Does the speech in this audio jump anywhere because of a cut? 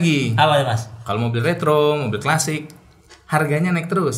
no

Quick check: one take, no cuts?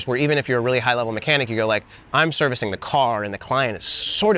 yes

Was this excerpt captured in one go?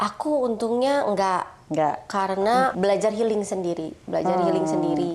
no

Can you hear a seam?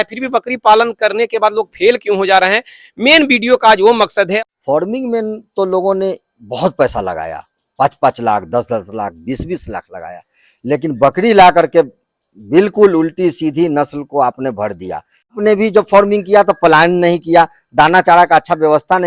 yes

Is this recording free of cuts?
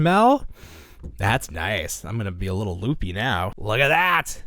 no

